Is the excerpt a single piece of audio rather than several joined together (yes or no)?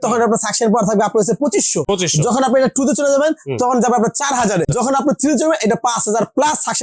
no